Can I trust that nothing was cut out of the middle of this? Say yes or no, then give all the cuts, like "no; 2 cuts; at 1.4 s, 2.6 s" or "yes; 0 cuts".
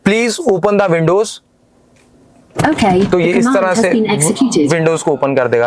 yes; 0 cuts